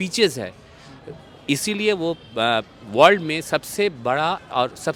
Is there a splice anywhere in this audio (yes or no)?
no